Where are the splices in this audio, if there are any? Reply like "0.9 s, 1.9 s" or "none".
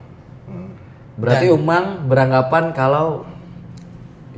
1.0 s